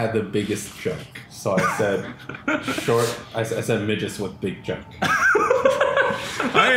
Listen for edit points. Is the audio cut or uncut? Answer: uncut